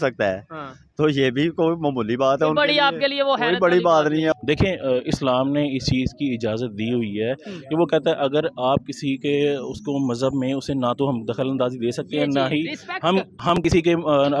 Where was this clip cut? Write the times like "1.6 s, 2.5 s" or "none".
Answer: 4.3 s